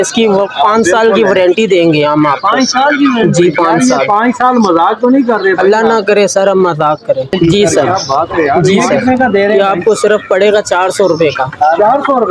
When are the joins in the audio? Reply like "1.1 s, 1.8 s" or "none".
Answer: 9.0 s